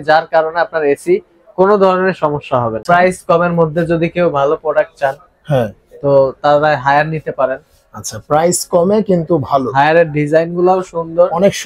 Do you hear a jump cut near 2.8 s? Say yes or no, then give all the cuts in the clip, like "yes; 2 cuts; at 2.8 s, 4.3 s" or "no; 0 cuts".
yes; 1 cut; at 2.8 s